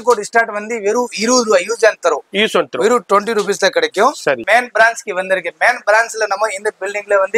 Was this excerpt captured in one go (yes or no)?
no